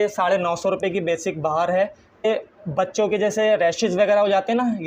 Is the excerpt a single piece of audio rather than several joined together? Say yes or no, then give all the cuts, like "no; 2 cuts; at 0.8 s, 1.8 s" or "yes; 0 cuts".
no; 1 cut; at 2.2 s